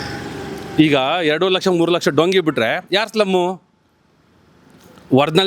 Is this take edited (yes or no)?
no